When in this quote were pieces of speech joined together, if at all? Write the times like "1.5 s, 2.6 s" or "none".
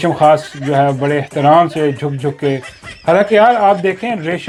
none